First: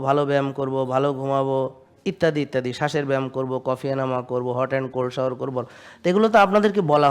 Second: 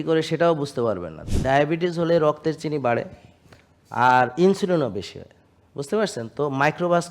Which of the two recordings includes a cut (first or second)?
second